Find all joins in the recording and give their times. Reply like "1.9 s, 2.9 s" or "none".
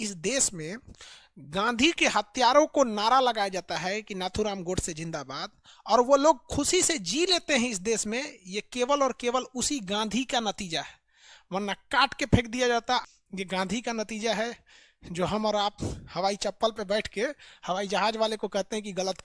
13.1 s